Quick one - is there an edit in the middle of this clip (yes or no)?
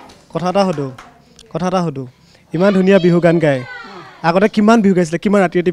no